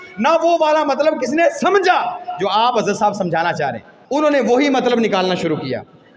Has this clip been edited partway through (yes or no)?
yes